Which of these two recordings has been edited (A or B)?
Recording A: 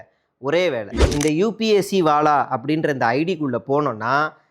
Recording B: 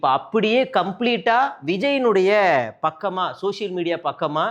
A